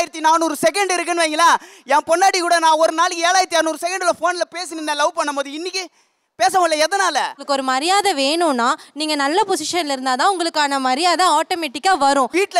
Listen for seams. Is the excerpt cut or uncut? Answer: cut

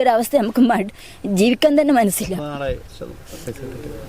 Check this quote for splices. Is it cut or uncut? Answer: uncut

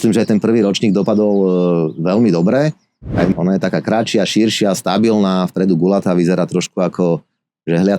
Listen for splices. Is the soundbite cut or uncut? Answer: cut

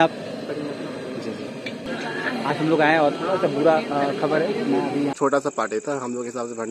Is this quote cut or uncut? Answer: cut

